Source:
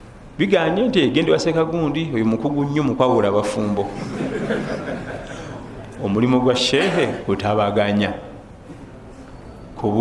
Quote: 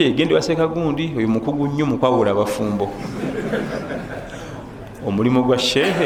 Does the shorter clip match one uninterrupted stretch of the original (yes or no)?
yes